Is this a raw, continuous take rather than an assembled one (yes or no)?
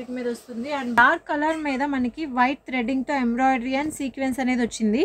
no